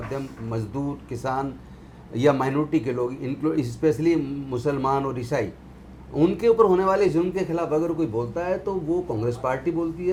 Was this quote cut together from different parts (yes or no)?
no